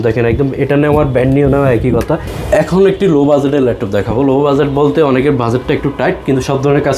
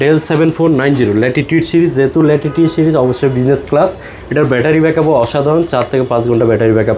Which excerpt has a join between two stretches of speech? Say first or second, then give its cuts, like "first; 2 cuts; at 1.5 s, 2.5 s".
first; 1 cut; at 2.3 s